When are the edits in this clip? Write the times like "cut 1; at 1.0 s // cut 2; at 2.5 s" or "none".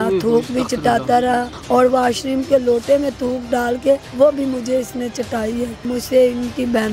cut 1; at 1.5 s // cut 2; at 4.1 s // cut 3; at 5.8 s